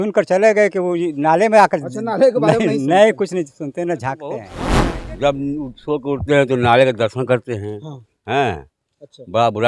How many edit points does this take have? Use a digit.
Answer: 1